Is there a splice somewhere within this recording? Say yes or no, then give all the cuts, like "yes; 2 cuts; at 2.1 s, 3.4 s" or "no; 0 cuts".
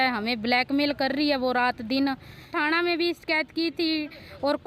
yes; 1 cut; at 2.5 s